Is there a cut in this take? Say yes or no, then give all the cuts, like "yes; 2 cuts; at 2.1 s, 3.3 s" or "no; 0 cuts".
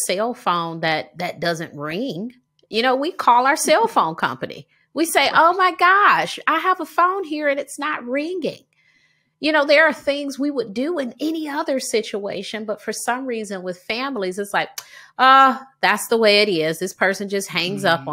no; 0 cuts